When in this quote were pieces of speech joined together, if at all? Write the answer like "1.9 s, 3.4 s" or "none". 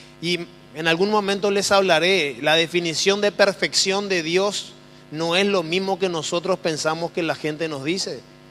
1.9 s

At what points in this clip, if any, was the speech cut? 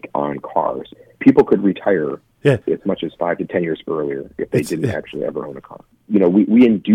0.9 s, 2.6 s, 5.9 s

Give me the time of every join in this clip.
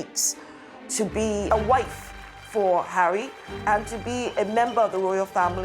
1.5 s

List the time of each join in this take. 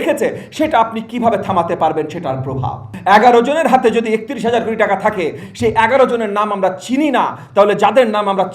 2.9 s

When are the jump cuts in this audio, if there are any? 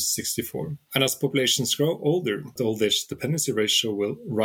2.5 s

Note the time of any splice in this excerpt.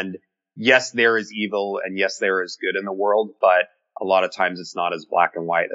none

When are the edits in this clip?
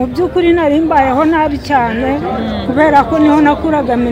none

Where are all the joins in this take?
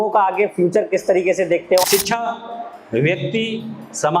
1.8 s

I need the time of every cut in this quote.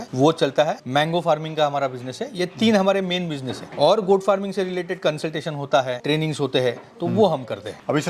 none

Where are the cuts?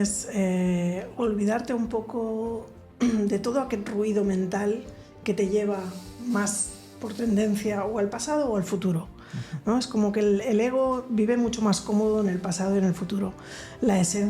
none

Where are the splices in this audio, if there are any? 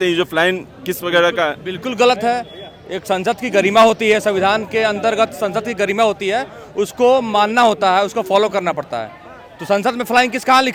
none

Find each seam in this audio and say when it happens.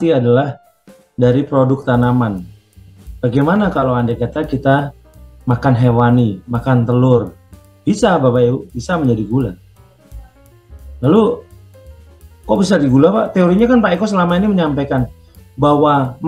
7.6 s

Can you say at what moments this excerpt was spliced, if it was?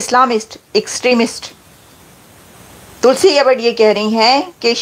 none

